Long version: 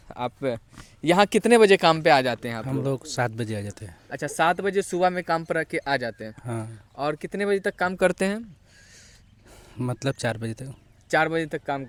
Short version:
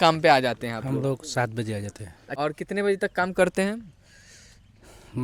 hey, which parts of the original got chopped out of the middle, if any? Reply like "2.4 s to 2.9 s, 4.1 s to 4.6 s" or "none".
4.0 s to 6.8 s